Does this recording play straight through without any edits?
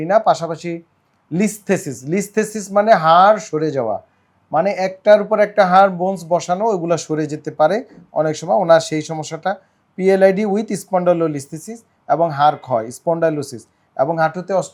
yes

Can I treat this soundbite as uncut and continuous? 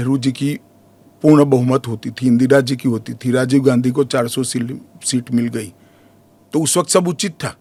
yes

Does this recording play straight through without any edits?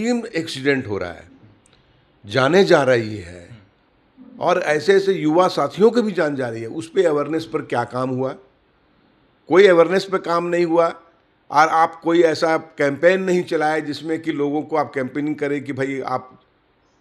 yes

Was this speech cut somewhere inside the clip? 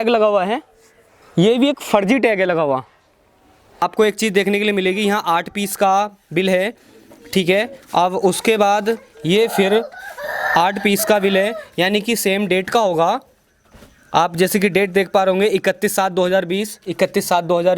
yes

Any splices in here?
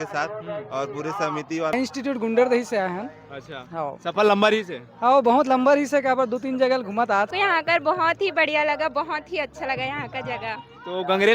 yes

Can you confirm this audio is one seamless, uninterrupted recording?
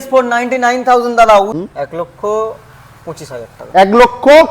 no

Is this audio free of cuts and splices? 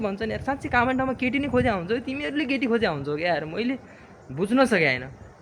yes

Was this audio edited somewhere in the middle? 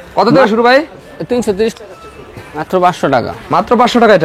yes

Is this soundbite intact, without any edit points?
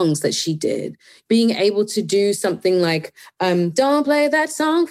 no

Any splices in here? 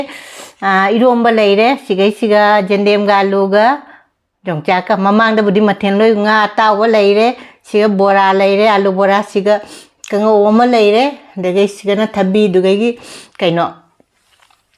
no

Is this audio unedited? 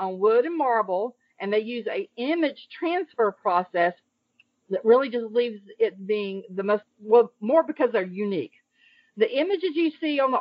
no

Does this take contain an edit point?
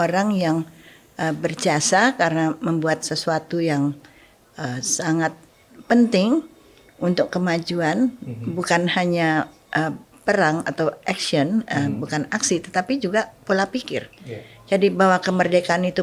no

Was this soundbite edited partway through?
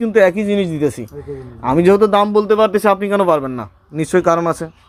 no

